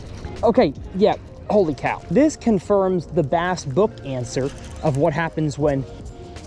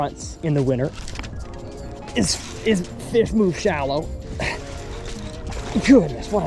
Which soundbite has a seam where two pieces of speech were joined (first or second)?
first